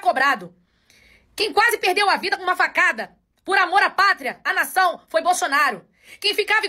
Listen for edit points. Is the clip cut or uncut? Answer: uncut